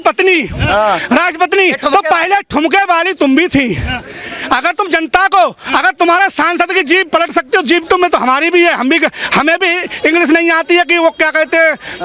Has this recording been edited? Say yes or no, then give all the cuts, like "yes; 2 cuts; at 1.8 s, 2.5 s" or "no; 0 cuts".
no; 0 cuts